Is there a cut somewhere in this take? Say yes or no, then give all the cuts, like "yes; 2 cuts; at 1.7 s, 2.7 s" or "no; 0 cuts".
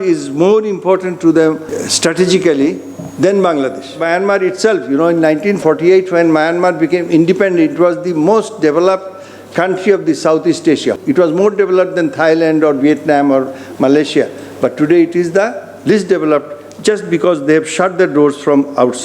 yes; 4 cuts; at 1.7 s, 4.0 s, 5.6 s, 11.0 s